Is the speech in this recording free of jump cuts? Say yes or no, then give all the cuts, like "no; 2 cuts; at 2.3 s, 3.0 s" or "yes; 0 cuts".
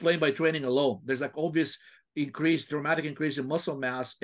yes; 0 cuts